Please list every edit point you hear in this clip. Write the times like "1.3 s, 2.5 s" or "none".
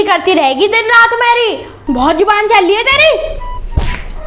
1.8 s